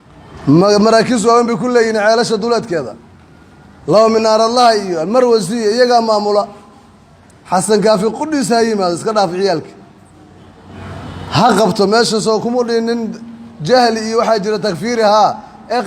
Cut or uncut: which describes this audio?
uncut